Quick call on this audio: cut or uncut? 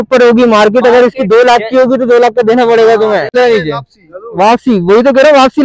cut